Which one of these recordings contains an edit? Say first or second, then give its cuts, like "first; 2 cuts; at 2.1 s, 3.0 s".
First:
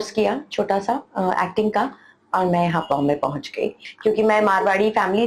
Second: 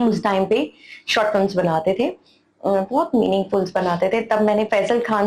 first; 1 cut; at 3.8 s